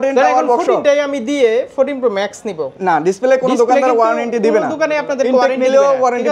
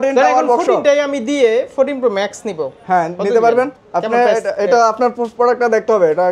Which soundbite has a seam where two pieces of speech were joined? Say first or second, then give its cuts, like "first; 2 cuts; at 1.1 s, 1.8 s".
first; 1 cut; at 2.7 s